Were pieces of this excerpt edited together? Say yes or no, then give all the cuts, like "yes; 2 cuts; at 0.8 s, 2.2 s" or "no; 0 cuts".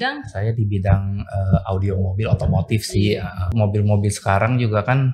yes; 1 cut; at 3.5 s